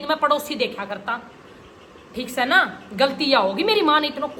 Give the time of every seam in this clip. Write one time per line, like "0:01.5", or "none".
none